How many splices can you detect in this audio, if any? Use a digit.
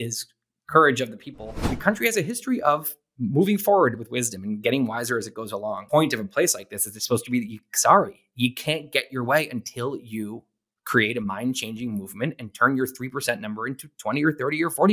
2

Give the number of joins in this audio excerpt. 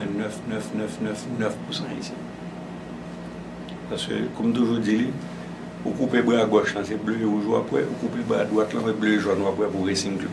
0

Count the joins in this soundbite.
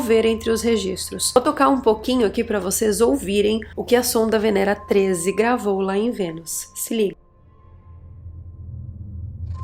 1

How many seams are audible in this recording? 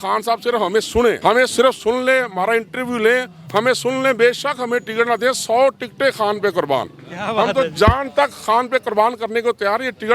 1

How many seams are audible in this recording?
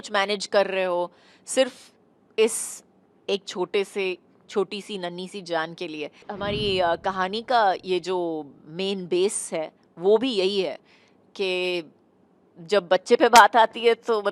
1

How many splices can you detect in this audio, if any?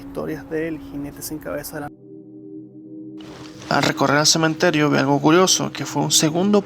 1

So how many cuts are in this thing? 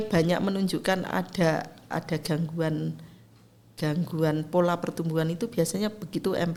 0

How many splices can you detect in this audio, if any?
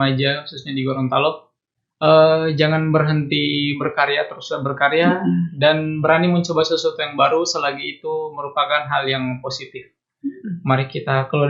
0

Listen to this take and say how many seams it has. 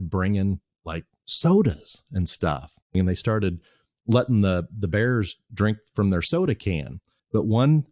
2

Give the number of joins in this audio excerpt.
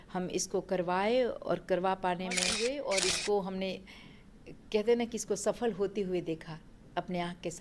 1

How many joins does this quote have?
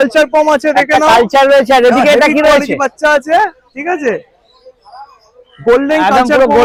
0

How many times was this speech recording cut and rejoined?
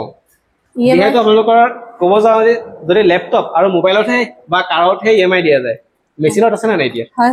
0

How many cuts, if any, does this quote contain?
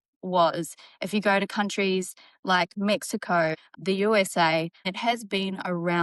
2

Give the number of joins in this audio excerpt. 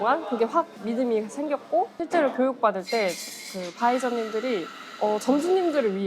1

